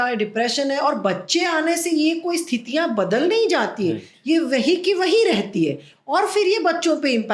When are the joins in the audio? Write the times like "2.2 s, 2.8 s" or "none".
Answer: none